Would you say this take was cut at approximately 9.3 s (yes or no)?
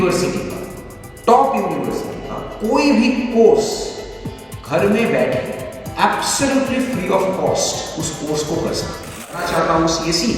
yes